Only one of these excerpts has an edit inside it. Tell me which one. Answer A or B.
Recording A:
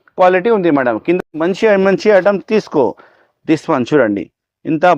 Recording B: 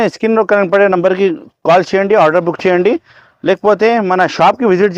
A